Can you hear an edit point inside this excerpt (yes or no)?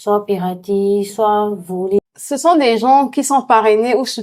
yes